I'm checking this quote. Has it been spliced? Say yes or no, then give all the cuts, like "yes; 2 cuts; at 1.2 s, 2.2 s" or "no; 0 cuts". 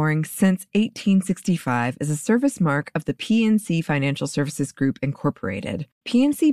no; 0 cuts